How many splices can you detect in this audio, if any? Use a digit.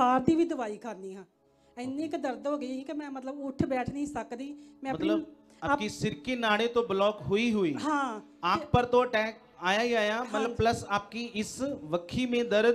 0